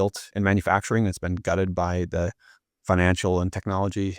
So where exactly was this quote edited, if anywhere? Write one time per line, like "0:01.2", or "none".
none